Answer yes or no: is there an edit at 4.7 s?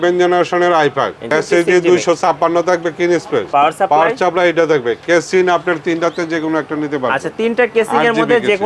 no